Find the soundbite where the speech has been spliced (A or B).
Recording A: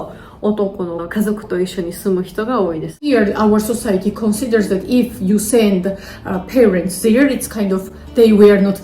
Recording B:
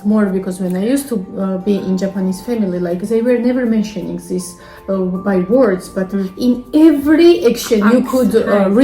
A